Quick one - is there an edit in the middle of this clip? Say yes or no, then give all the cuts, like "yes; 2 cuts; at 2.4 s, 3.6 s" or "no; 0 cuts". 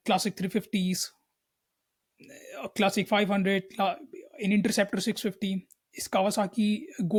no; 0 cuts